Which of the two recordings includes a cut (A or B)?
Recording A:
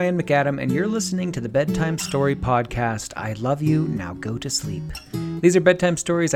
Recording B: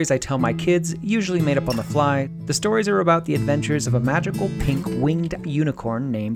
B